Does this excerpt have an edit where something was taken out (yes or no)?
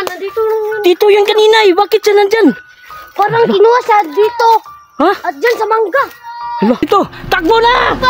yes